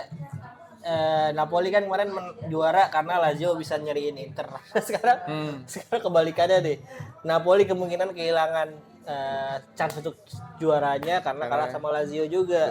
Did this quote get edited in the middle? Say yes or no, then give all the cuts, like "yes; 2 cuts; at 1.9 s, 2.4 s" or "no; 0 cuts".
no; 0 cuts